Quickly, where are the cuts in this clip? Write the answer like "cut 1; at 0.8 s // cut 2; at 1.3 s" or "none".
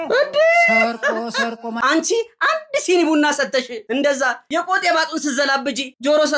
cut 1; at 1.8 s